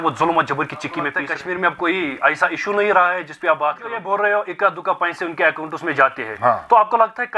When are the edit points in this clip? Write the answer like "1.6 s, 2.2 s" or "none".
1.1 s, 3.9 s